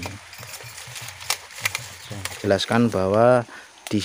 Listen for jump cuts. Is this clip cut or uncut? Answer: cut